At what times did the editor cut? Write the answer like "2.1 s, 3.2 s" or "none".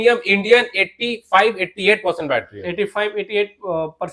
none